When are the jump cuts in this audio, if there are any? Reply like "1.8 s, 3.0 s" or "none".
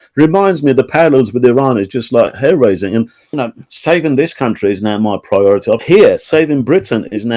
3.2 s, 5.8 s